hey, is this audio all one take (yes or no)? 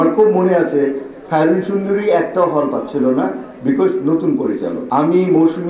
no